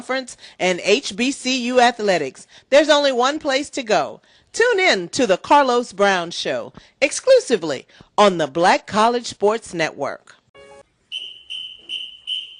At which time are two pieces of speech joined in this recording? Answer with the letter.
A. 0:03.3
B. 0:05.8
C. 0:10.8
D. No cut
C